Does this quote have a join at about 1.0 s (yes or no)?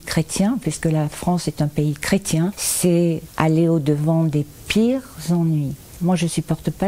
no